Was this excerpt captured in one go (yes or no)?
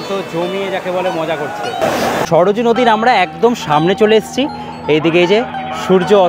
yes